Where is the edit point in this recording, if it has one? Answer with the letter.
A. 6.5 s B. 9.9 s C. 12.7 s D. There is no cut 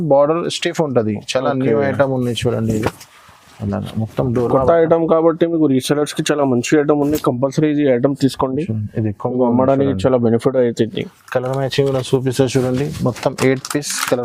D